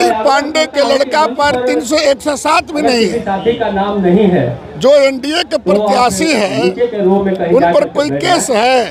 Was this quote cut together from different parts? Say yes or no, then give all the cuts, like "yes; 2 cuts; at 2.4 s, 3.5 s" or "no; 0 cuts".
no; 0 cuts